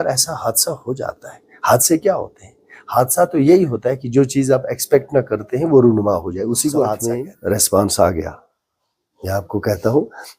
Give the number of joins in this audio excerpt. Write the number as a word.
one